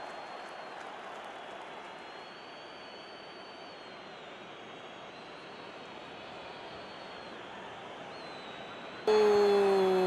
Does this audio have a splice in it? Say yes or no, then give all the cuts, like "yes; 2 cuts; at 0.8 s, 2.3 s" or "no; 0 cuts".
yes; 1 cut; at 9.1 s